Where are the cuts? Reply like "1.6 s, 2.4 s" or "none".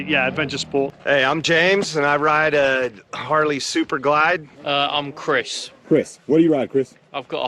1.0 s, 4.5 s